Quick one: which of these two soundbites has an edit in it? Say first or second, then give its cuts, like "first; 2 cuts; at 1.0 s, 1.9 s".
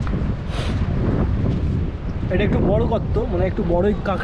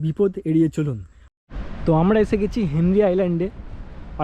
second; 1 cut; at 1.3 s